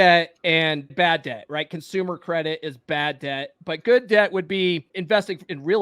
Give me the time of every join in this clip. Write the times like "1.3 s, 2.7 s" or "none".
0.9 s, 4.9 s